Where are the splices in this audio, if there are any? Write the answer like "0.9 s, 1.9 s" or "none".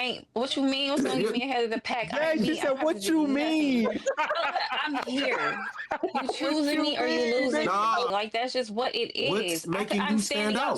8.1 s